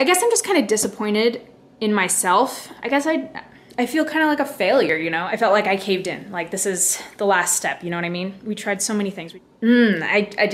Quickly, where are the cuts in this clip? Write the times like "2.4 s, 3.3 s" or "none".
2.7 s, 4.9 s, 9.2 s